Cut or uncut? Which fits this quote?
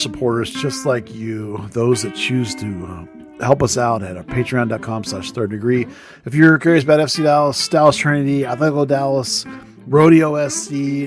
uncut